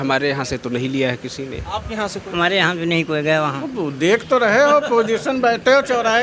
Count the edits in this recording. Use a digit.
1